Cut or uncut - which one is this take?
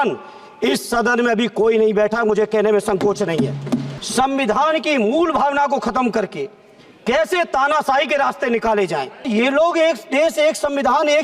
cut